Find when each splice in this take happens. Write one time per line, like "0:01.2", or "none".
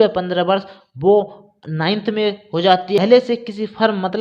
0:03.0